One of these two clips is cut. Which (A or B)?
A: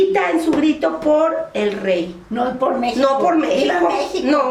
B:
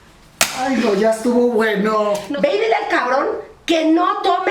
B